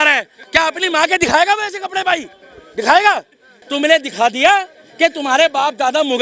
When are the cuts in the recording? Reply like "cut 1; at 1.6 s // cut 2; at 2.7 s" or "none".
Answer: cut 1; at 3.6 s